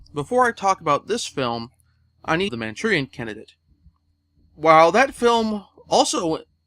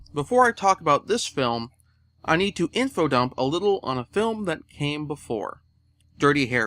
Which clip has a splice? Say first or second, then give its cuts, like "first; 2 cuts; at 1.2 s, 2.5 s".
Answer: second; 1 cut; at 2.5 s